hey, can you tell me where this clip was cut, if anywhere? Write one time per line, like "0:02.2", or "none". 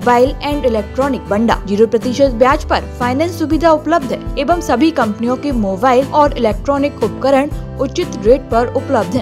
0:01.3
0:04.3
0:06.1